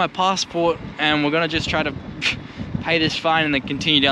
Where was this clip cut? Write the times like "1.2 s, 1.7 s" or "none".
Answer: none